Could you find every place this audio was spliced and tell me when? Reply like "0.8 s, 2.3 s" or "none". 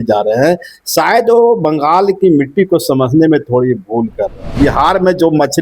4.5 s

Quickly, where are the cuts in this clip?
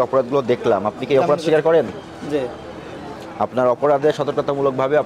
3.2 s

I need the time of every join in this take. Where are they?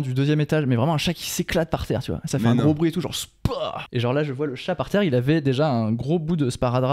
3.8 s

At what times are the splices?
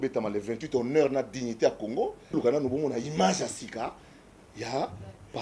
2.3 s

